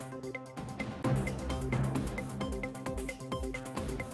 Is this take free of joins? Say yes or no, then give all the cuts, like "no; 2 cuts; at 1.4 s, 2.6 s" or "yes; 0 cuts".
yes; 0 cuts